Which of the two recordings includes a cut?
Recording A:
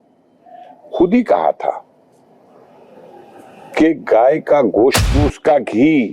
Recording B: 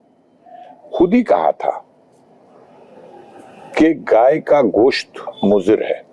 A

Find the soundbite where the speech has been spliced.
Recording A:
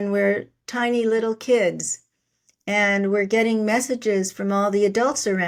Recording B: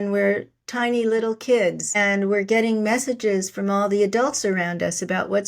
B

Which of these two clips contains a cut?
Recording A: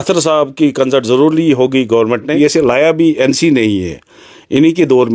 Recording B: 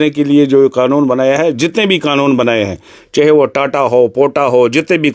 A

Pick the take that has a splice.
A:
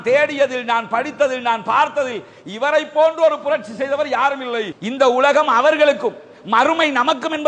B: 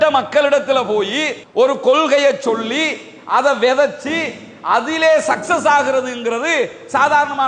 A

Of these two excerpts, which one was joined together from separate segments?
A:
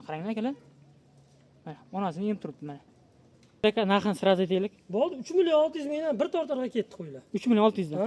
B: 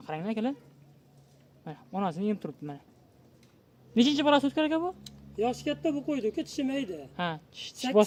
A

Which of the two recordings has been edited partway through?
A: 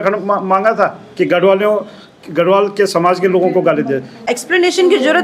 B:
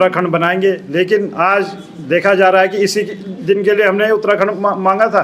A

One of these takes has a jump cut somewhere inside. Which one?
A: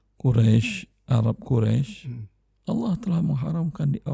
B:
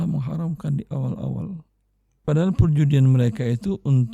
B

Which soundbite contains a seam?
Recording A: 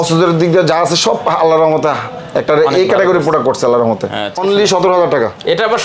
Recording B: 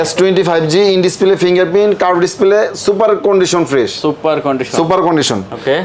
A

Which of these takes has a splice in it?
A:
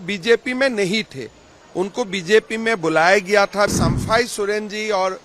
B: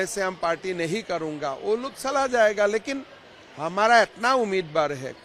A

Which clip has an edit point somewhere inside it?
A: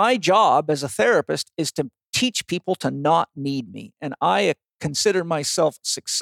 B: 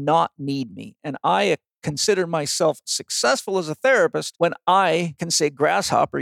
B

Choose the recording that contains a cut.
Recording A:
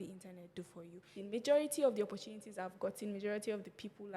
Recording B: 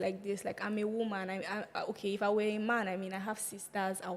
A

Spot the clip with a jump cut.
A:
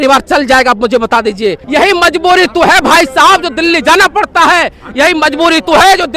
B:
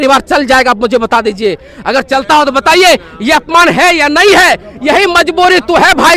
A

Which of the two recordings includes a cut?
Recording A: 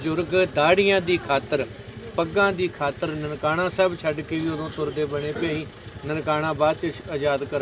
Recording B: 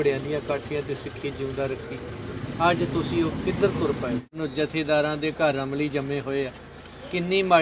B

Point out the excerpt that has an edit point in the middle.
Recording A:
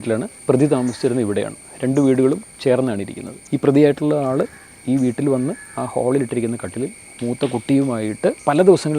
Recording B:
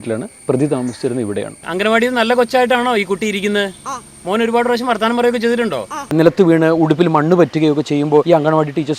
B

